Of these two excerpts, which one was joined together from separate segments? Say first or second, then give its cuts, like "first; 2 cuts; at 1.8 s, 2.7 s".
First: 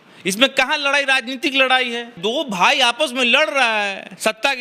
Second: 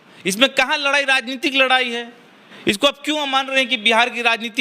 first; 1 cut; at 2.2 s